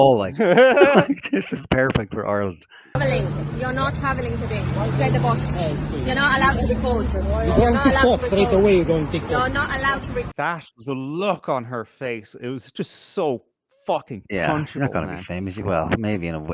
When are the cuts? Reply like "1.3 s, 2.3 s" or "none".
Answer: 2.9 s, 10.3 s